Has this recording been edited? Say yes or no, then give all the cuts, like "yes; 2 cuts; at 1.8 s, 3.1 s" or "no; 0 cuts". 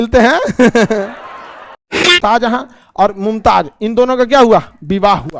yes; 1 cut; at 2.2 s